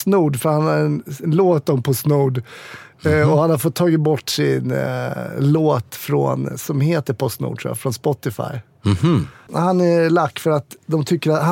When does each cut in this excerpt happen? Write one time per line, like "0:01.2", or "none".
0:09.5